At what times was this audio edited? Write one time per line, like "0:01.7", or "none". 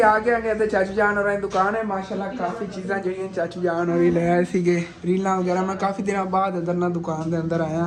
none

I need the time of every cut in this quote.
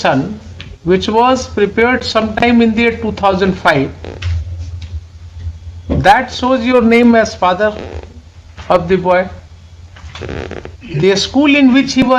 none

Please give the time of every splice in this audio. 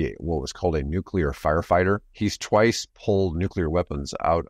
0:02.1
0:03.3

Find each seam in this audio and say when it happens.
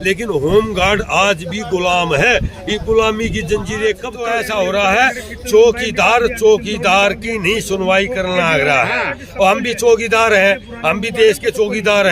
0:04.1

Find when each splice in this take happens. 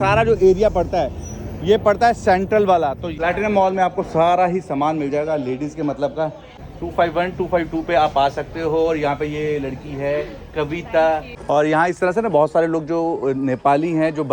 0:03.1
0:06.5
0:11.3

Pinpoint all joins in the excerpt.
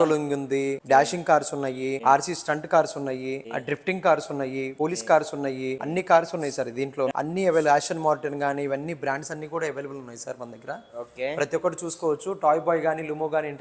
0:00.8
0:02.0
0:03.4
0:04.7
0:05.8
0:07.1

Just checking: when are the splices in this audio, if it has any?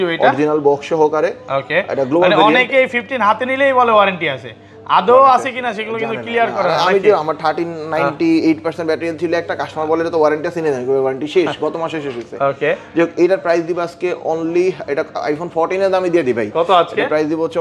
none

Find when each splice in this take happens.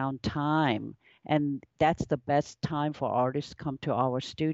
none

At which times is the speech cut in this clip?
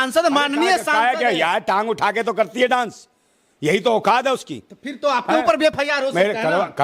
none

